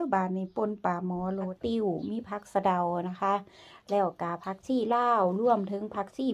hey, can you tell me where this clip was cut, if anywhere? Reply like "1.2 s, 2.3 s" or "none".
1.5 s